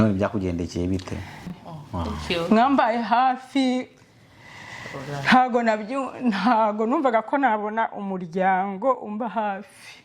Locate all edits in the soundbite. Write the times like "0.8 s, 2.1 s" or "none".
1.5 s